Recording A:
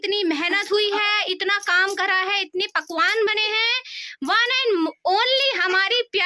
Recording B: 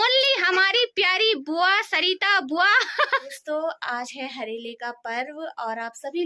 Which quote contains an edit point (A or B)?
B